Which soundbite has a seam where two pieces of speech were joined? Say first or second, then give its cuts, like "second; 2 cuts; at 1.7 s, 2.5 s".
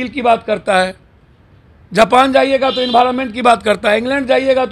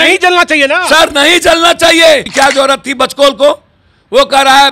second; 1 cut; at 2.3 s